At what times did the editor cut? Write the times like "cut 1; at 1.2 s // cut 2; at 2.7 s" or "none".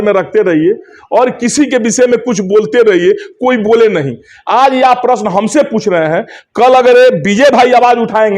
none

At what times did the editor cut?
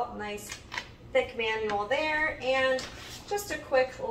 none

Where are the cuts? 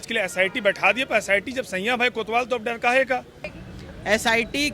cut 1; at 3.5 s

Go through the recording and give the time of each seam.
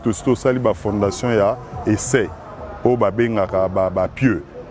none

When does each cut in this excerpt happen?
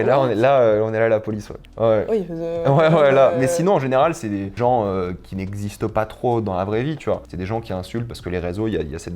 none

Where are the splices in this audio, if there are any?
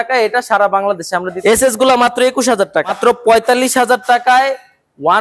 cut 1; at 1.3 s // cut 2; at 3.0 s

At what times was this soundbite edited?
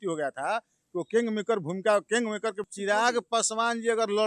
cut 1; at 2.7 s

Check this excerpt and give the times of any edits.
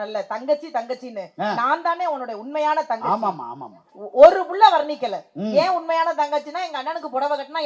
none

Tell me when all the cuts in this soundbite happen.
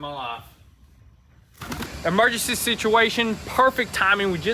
cut 1; at 1.9 s

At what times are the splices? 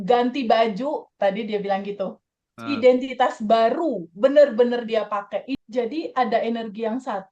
cut 1; at 5.5 s

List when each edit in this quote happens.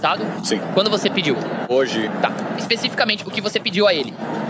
cut 1; at 1.7 s

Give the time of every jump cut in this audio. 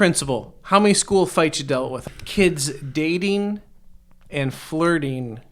cut 1; at 2.0 s

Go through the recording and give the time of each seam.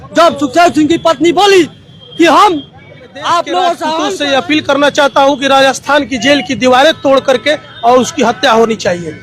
cut 1; at 4.1 s

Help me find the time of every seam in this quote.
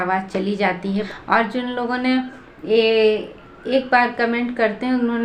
cut 1; at 1.1 s

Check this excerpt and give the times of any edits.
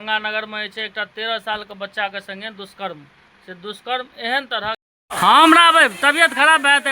cut 1; at 4.9 s

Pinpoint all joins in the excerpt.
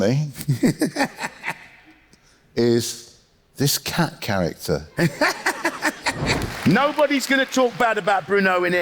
cut 1; at 6.4 s

